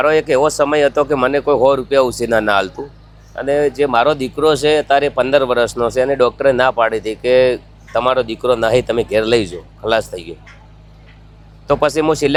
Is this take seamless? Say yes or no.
yes